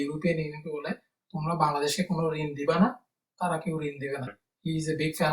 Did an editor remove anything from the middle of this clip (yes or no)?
yes